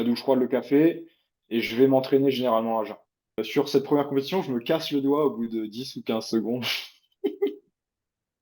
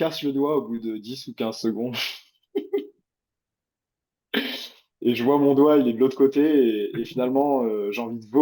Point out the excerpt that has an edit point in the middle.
first; 1 cut; at 3.5 s

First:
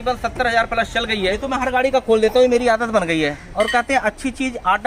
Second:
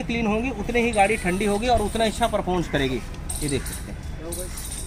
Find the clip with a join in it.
first; 1 cut; at 1.3 s

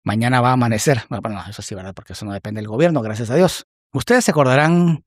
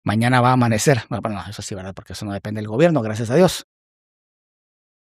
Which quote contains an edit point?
first; 1 cut; at 3.9 s

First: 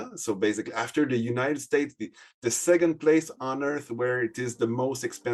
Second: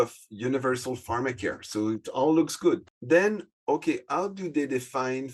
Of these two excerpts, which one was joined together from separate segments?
second; 1 cut; at 2.9 s

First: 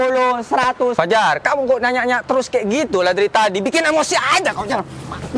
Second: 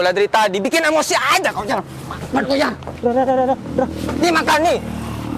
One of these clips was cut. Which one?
first; 1 cut; at 1.1 s

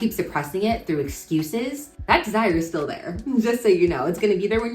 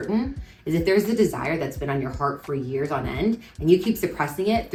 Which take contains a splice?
first; 1 cut; at 1.9 s

